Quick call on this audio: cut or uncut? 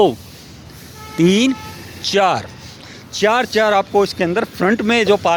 uncut